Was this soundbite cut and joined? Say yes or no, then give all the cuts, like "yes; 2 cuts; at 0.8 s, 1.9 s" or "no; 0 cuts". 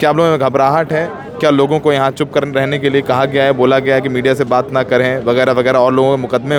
no; 0 cuts